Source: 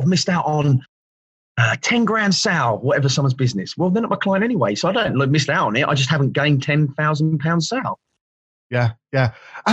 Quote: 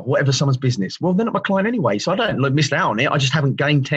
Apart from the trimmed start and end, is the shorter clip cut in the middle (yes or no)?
no